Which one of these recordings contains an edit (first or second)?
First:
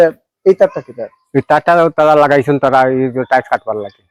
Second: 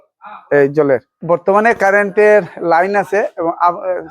second